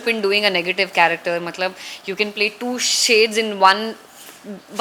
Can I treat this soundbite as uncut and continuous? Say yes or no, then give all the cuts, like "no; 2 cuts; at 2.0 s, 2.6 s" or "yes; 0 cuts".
yes; 0 cuts